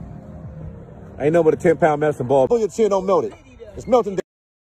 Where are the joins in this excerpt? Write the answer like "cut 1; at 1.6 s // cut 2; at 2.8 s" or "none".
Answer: cut 1; at 2.5 s